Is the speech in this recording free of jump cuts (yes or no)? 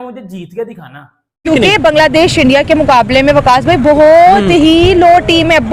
no